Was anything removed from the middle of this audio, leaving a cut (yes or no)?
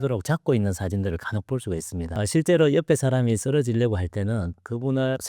yes